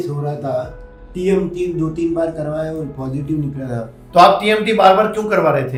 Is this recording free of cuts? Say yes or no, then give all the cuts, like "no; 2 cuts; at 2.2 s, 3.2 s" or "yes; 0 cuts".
yes; 0 cuts